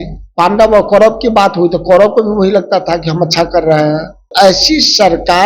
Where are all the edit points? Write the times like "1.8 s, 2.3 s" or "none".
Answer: 4.3 s